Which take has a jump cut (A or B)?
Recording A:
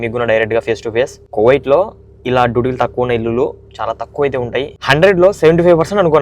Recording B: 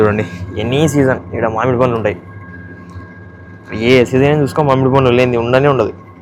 A